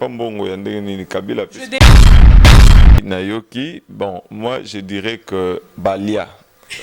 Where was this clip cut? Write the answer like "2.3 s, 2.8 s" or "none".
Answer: 1.7 s, 3.0 s